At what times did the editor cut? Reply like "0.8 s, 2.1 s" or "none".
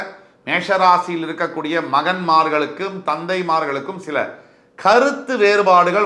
none

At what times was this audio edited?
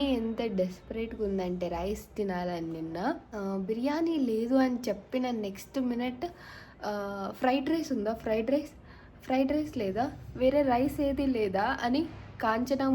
3.3 s

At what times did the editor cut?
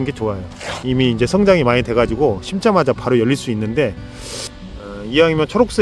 none

